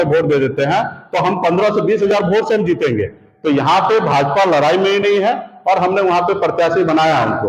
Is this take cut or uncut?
uncut